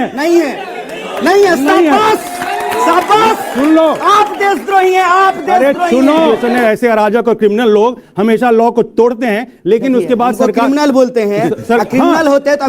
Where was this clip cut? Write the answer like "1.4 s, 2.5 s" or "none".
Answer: 6.3 s